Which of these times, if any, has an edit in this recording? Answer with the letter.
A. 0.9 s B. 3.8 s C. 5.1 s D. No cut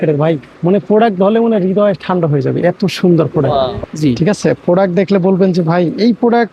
B